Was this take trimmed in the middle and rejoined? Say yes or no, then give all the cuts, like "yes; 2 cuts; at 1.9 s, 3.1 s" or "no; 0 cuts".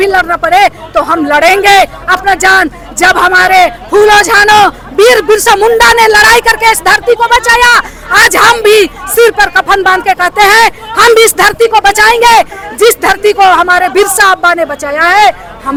no; 0 cuts